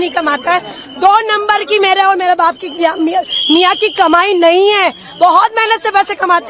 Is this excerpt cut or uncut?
uncut